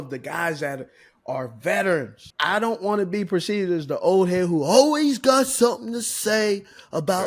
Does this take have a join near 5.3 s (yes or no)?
no